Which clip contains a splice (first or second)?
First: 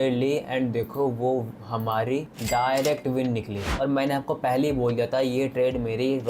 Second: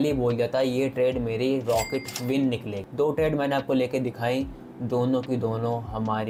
first